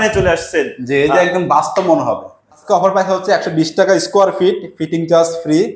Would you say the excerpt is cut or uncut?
cut